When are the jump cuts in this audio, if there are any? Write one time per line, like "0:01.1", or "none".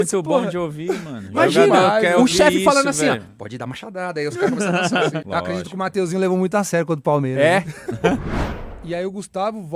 0:05.2
0:08.2